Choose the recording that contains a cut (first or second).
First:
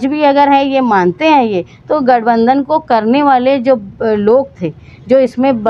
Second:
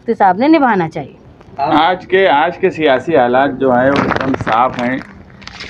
second